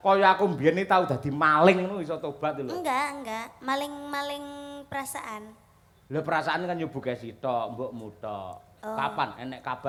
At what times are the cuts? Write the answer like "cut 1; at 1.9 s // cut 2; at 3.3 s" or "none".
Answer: none